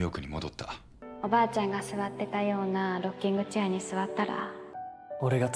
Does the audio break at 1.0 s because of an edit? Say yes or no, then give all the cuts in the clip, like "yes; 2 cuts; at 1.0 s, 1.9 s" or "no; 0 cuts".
yes; 2 cuts; at 1.0 s, 4.6 s